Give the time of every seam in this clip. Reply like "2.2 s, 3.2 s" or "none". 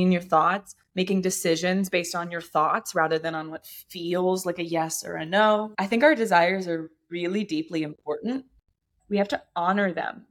5.7 s, 8.9 s